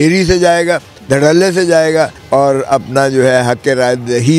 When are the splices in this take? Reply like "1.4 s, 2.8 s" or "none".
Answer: 0.9 s, 2.2 s

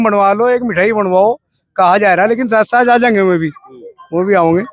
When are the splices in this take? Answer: none

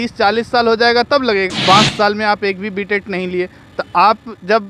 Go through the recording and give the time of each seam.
1.5 s

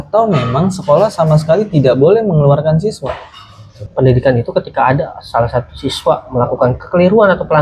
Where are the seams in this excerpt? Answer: 3.8 s

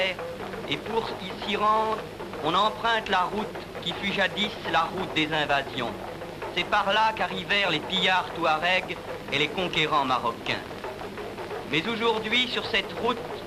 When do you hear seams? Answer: 5.3 s

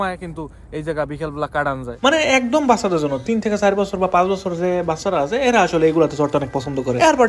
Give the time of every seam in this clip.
1.8 s

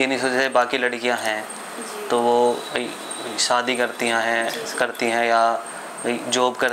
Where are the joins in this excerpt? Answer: none

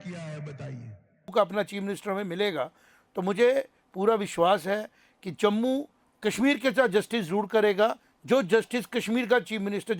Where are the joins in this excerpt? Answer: 1.3 s, 6.0 s

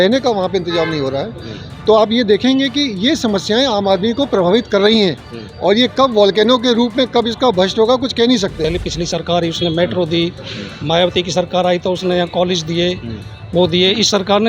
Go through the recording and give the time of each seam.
8.6 s

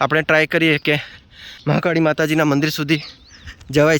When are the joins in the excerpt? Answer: 1.8 s

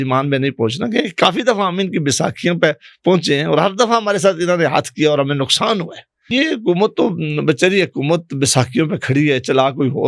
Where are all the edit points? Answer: 6.3 s

